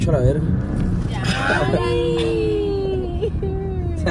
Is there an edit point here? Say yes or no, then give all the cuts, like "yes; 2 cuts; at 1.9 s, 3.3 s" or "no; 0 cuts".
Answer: no; 0 cuts